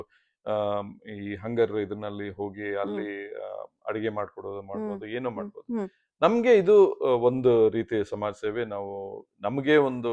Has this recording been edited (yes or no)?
no